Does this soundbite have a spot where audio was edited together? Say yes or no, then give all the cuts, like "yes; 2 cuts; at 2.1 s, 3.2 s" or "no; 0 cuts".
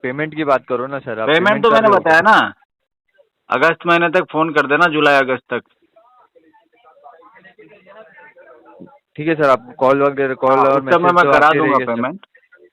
no; 0 cuts